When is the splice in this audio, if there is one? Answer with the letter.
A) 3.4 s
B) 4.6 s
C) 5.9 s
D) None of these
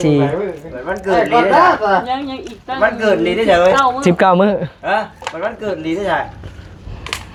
D